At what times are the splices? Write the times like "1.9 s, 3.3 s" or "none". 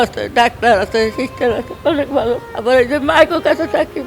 2.5 s